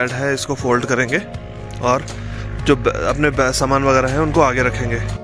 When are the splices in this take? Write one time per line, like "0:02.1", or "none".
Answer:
none